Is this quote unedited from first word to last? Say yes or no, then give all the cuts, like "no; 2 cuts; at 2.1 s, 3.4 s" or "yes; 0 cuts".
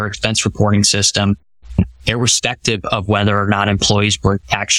no; 1 cut; at 1.8 s